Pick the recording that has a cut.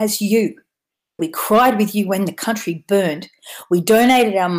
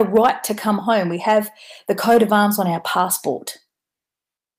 first; 1 cut; at 1.2 s

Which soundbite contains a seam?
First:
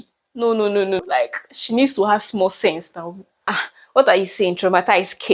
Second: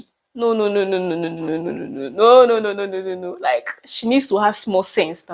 first; 2 cuts; at 1.0 s, 3.5 s

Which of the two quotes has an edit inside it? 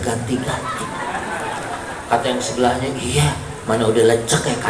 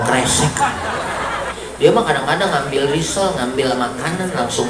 second; 1 cut; at 1.6 s

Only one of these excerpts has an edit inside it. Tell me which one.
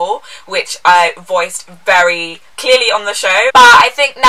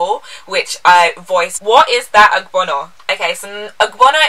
second; 1 cut; at 1.6 s

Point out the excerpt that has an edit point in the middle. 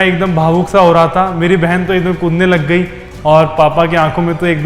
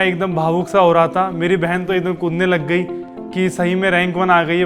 first; 1 cut; at 3.0 s

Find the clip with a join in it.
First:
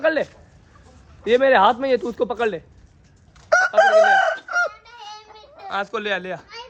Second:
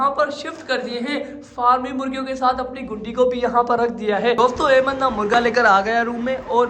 second; 1 cut; at 4.4 s

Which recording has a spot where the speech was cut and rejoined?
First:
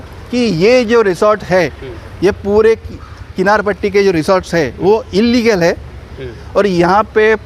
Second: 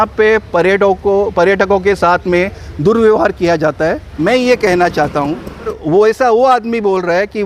second; 2 cuts; at 4.1 s, 5.8 s

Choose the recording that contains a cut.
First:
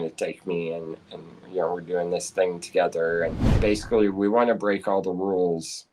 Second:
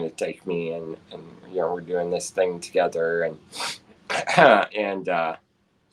first; 1 cut; at 3.4 s

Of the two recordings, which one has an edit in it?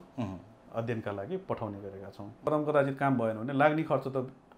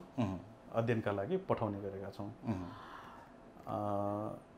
first; 1 cut; at 2.5 s

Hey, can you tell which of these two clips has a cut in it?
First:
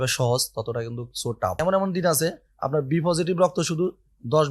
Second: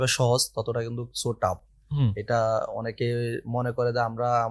first; 1 cut; at 1.6 s

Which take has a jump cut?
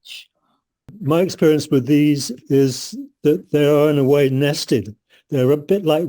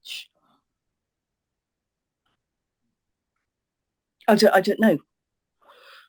first; 1 cut; at 0.9 s

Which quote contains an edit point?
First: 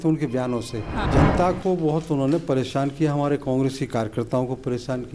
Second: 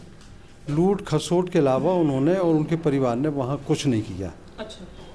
first; 1 cut; at 1.1 s

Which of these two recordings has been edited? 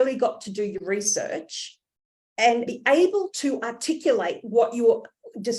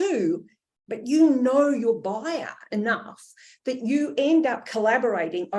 first; 1 cut; at 2.7 s

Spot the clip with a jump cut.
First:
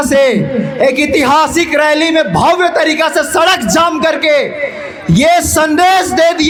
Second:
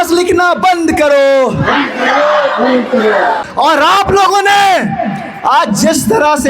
second; 1 cut; at 3.4 s

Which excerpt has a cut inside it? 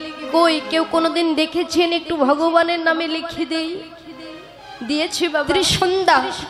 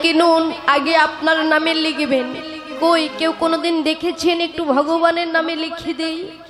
first; 1 cut; at 5.5 s

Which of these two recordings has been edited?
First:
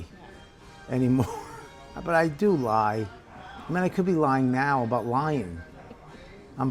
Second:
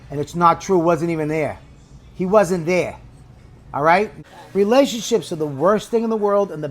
second; 1 cut; at 4.2 s

